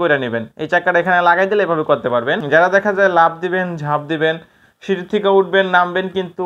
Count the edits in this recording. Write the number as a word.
one